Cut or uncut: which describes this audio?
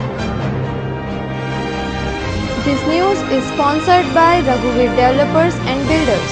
uncut